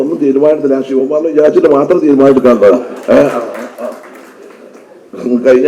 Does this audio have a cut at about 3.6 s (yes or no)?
no